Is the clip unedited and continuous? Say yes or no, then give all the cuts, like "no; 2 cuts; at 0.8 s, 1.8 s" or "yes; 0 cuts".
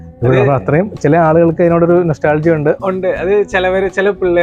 yes; 0 cuts